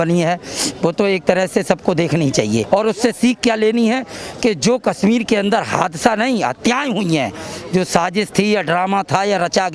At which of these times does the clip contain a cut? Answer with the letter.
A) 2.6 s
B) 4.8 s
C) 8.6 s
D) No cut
A